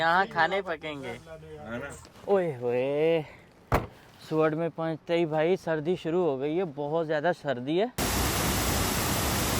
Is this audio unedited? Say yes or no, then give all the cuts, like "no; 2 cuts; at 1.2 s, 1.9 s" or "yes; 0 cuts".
no; 2 cuts; at 2.1 s, 8.0 s